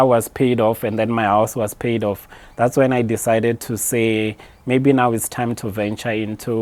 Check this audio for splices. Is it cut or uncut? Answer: uncut